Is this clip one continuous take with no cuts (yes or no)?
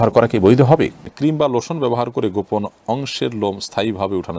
no